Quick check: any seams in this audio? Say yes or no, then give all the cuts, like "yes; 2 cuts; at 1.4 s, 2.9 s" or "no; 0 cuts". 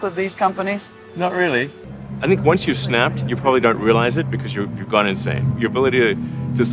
yes; 2 cuts; at 1.0 s, 1.8 s